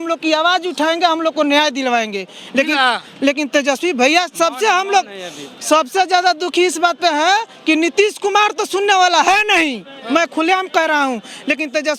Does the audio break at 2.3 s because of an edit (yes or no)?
no